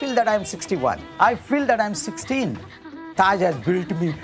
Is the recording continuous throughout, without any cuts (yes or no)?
no